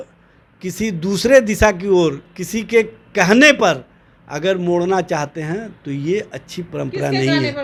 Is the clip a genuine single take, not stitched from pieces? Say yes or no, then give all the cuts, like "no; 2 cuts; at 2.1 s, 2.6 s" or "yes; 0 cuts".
yes; 0 cuts